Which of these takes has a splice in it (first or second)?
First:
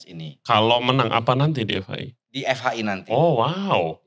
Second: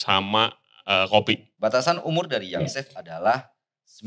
second